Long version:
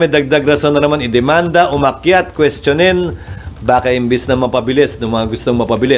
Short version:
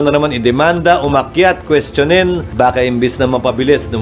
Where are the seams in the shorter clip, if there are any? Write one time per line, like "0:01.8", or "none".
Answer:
0:02.4